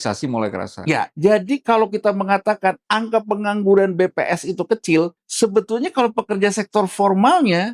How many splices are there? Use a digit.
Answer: 1